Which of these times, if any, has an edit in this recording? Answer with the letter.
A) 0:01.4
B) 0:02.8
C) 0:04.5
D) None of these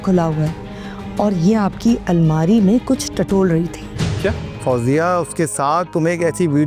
C